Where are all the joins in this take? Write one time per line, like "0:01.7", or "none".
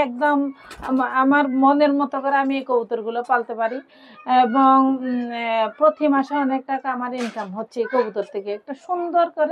none